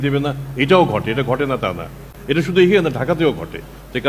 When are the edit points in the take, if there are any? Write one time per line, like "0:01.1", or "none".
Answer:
none